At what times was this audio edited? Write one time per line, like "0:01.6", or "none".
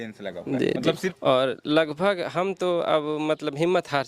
0:01.1